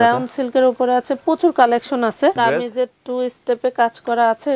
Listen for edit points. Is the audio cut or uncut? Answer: cut